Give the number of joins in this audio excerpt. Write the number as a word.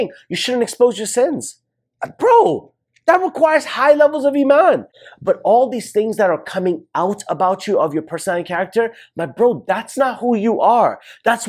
one